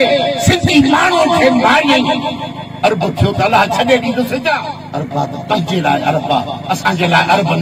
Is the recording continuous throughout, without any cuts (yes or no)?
no